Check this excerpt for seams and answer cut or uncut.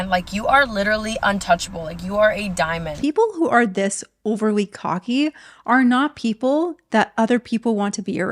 cut